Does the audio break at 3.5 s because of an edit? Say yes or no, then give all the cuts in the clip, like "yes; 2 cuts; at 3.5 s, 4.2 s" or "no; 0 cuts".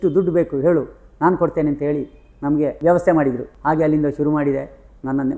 yes; 2 cuts; at 2.8 s, 3.5 s